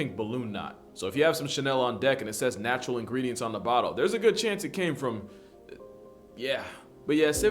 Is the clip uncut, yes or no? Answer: yes